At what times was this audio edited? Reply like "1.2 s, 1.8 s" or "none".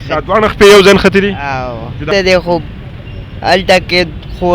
2.0 s